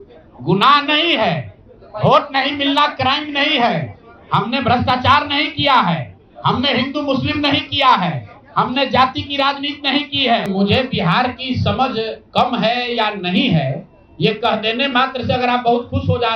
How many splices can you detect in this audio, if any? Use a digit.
1